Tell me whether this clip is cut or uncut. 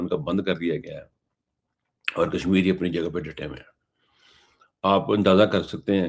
uncut